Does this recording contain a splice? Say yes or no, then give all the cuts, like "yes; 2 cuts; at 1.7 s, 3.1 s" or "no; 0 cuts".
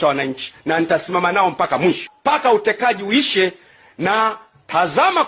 no; 0 cuts